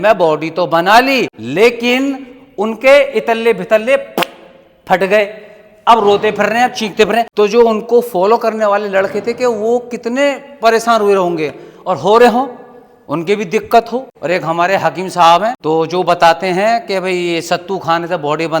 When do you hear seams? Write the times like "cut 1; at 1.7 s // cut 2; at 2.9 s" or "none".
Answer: cut 1; at 1.4 s // cut 2; at 7.3 s // cut 3; at 14.1 s // cut 4; at 15.6 s